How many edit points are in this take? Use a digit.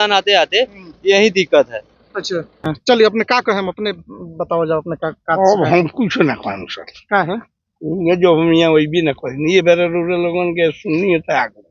1